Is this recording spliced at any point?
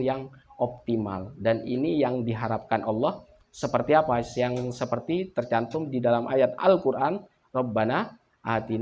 no; 0 cuts

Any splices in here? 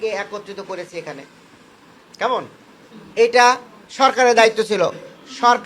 no; 0 cuts

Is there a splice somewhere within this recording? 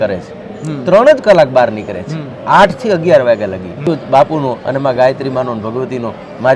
yes; 1 cut; at 3.9 s

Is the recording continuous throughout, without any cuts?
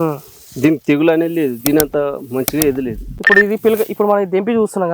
no; 1 cut; at 3.1 s

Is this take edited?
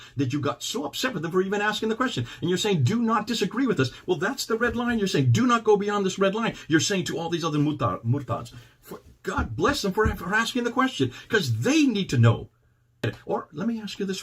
yes; 1 cut; at 13.1 s

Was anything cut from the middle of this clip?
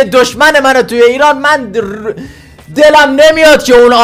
no; 0 cuts

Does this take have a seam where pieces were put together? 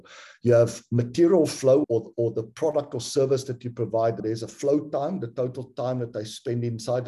yes; 2 cuts; at 1.8 s, 4.2 s

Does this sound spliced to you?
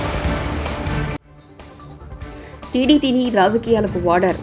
no; 0 cuts

